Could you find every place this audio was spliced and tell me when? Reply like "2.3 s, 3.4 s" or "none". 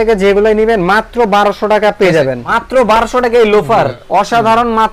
2.4 s, 4.0 s